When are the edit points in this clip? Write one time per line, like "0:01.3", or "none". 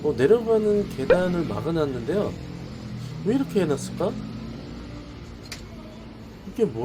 none